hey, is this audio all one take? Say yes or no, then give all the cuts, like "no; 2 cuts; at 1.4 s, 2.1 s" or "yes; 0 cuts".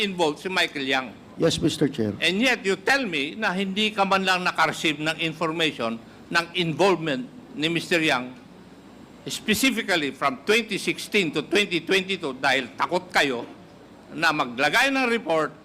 no; 1 cut; at 1.2 s